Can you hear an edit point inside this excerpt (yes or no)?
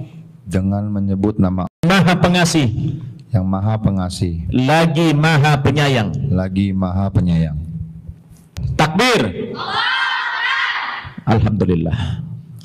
yes